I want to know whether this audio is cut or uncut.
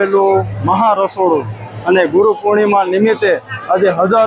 uncut